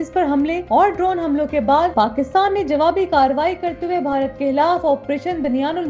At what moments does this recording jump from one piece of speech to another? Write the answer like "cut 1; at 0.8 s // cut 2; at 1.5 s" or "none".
none